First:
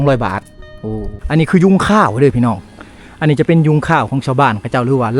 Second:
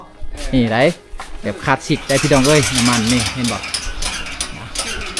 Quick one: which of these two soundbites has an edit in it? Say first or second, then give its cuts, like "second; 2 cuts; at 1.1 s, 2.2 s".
first; 1 cut; at 1.1 s